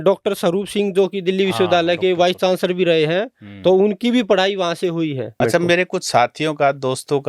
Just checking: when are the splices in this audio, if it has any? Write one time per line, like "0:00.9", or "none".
0:05.4